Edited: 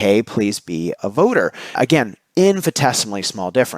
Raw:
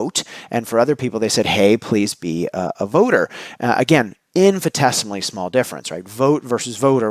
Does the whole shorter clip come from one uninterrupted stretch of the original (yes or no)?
no